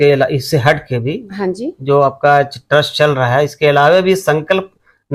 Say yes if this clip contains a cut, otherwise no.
no